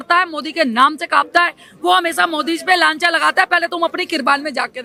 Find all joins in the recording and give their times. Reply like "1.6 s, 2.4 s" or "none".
none